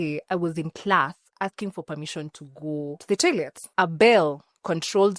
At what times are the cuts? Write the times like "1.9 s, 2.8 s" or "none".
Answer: 3.0 s, 3.6 s